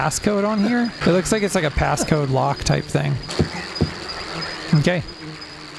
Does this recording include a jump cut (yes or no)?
yes